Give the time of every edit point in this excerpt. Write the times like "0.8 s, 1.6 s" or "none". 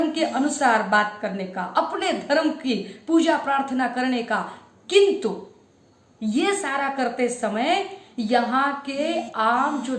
none

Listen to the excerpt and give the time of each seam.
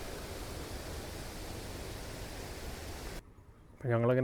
none

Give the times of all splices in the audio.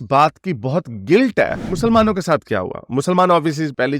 1.6 s

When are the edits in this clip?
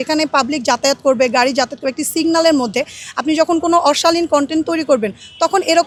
none

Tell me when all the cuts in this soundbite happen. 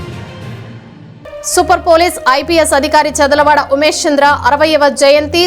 1.1 s

